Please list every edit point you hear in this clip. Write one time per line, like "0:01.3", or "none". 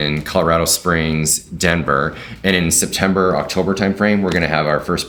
none

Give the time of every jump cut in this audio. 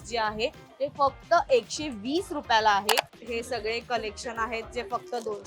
0:03.2

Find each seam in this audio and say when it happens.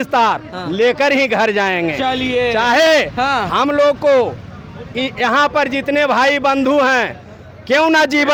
none

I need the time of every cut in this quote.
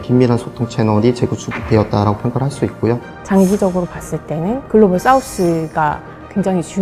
0:03.1

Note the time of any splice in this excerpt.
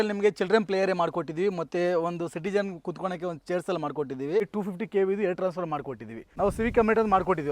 0:04.5
0:06.3

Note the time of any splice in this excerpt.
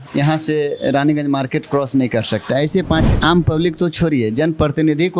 0:03.1

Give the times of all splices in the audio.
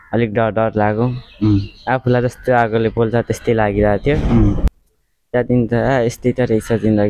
0:04.7

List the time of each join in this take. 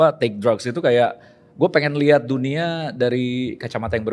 none

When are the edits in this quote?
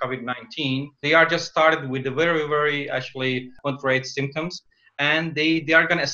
none

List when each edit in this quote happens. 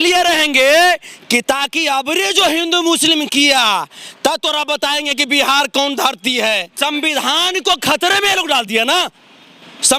0:06.7

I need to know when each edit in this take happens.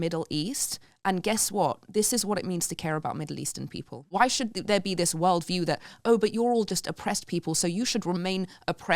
0:04.0

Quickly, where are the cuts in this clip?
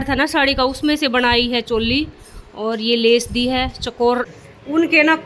0:04.3

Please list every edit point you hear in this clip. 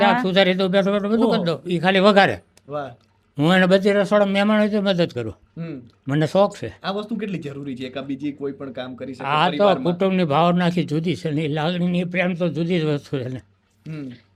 none

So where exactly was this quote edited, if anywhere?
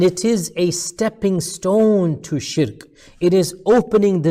none

